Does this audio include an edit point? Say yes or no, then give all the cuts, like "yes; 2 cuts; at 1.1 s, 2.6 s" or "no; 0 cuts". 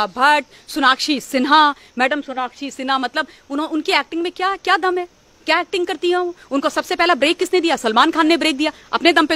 no; 0 cuts